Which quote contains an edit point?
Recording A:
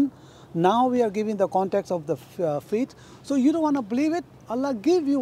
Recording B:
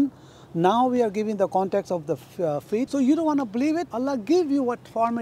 B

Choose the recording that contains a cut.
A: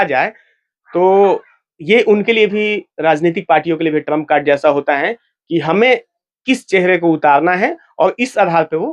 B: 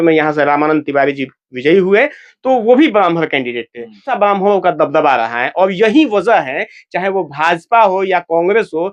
B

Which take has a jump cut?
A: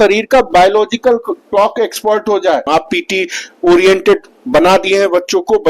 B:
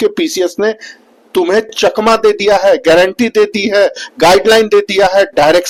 A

